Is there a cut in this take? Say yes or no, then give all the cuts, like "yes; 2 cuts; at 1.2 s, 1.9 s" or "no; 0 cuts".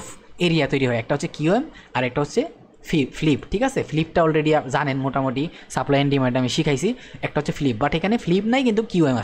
no; 0 cuts